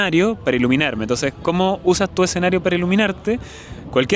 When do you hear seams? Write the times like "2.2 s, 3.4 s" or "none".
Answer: none